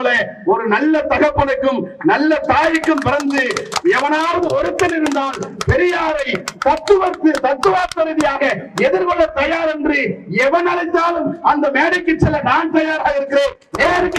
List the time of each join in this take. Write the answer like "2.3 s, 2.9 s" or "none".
none